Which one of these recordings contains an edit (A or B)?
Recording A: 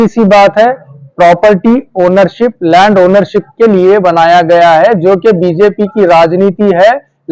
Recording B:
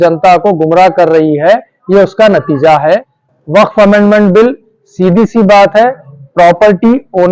B